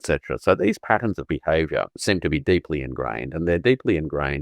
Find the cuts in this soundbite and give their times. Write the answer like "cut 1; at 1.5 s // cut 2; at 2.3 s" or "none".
cut 1; at 2.0 s